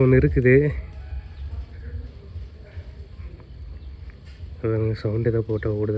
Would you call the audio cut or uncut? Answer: uncut